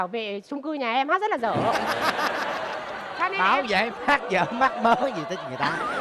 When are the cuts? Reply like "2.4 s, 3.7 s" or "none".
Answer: none